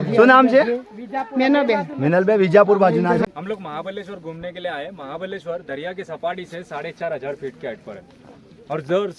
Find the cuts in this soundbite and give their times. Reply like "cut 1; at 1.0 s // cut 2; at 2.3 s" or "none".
cut 1; at 3.2 s